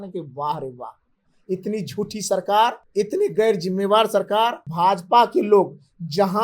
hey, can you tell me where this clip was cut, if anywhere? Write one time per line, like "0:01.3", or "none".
0:02.8
0:04.6